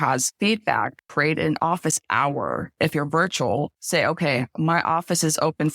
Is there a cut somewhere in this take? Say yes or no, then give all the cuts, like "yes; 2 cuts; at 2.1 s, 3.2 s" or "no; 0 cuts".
yes; 2 cuts; at 1.0 s, 2.7 s